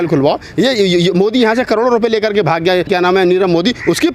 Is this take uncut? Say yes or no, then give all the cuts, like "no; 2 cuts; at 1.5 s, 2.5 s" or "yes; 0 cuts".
no; 1 cut; at 2.9 s